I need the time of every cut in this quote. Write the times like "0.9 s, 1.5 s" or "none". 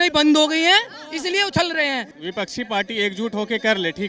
2.1 s